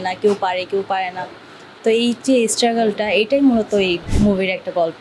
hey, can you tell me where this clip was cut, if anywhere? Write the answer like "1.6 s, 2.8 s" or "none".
4.1 s